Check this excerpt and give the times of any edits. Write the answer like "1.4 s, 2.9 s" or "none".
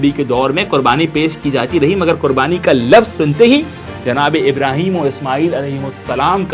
none